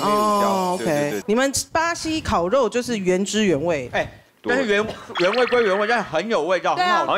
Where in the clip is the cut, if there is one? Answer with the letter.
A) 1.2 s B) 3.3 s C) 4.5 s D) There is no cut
A